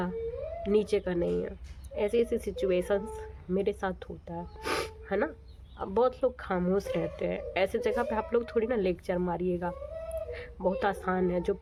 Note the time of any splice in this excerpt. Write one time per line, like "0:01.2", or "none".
none